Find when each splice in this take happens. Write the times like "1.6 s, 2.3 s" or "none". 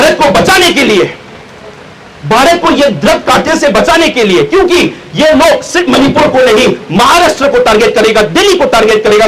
1.8 s